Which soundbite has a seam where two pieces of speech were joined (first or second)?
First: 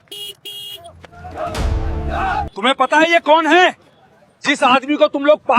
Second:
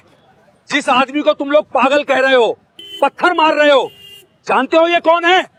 first